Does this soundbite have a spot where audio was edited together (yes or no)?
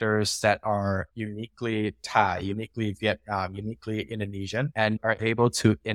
no